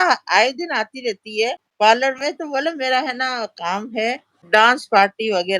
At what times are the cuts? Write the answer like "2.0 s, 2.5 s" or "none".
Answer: 1.6 s, 4.4 s

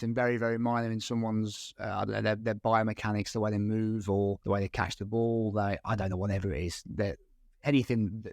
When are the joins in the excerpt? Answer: 4.4 s

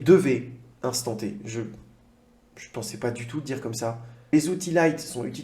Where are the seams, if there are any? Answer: 4.3 s

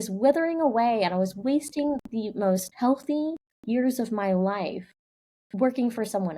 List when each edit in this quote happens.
2.7 s

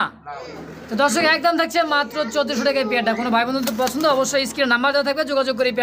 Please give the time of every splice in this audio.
none

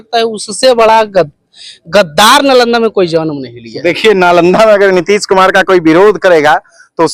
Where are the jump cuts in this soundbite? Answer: none

